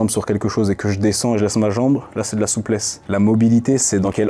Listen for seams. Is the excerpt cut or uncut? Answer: cut